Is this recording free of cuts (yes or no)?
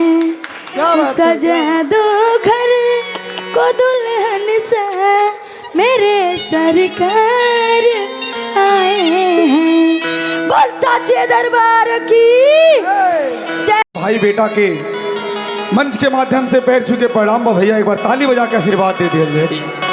no